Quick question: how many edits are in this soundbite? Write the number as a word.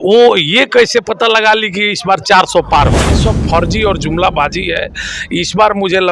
one